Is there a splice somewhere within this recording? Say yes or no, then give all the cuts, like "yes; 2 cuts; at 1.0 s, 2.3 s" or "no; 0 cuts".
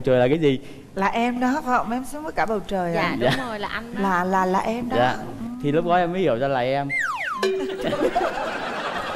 no; 0 cuts